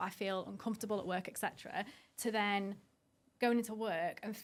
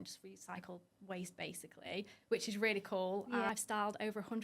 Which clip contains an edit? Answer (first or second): second